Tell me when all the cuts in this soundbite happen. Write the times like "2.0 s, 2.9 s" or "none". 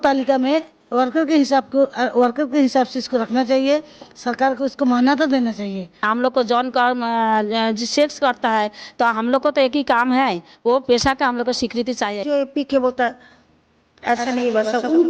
6.0 s, 12.2 s